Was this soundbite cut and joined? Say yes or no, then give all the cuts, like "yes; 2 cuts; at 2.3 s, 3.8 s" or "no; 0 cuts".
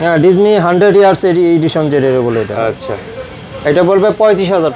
no; 0 cuts